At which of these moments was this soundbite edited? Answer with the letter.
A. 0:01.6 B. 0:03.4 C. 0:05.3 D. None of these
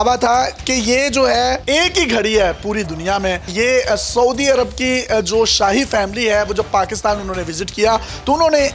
A